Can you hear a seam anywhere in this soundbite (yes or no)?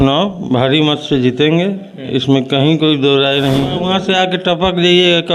yes